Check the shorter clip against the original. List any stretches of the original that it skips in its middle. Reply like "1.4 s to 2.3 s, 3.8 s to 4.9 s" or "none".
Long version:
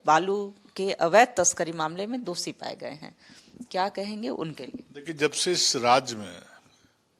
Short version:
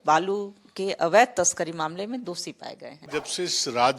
2.9 s to 5.0 s